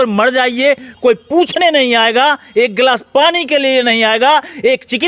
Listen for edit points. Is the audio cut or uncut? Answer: uncut